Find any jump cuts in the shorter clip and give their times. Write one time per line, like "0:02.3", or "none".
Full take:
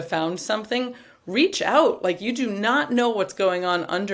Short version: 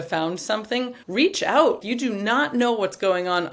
0:01.0
0:01.8